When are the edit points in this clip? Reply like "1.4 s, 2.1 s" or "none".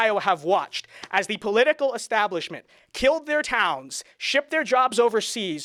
none